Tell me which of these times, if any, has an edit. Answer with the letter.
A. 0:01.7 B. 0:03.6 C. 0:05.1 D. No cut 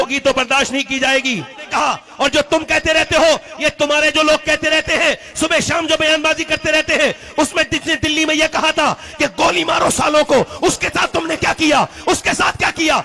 A